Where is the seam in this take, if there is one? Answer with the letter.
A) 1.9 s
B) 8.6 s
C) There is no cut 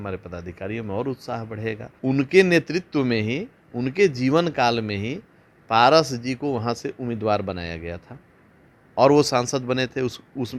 A